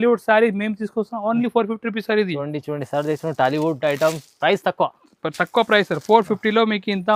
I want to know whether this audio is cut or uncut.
uncut